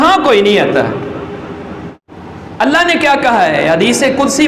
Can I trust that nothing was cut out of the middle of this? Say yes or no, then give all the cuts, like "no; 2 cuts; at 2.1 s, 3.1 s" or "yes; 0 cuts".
no; 1 cut; at 2.0 s